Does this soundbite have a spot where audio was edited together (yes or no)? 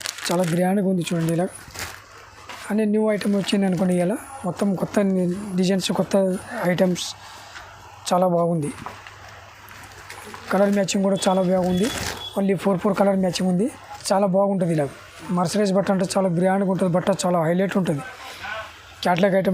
yes